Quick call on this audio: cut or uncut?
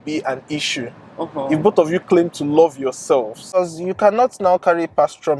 cut